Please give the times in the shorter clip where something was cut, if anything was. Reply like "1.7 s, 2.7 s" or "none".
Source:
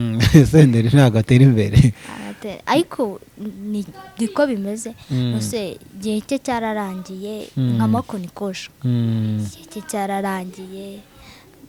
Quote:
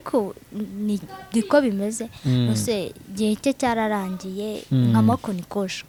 none